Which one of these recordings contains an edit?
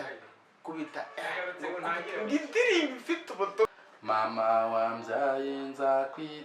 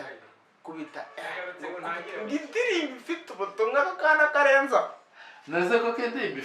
first; 1 cut; at 3.7 s

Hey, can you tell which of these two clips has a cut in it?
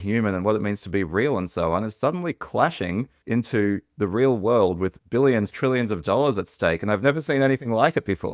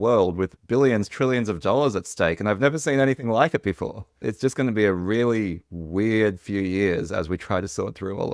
first; 1 cut; at 3.2 s

